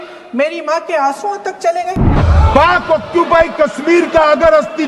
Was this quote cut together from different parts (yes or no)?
yes